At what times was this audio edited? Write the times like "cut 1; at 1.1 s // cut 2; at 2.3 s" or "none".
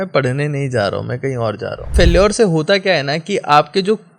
cut 1; at 1.9 s